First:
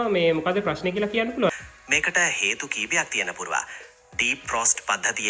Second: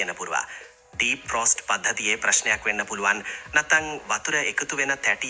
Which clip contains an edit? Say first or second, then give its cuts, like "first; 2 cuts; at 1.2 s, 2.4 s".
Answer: first; 1 cut; at 1.5 s